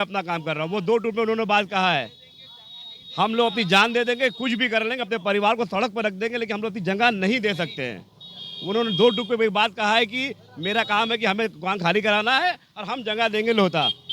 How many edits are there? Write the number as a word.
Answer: zero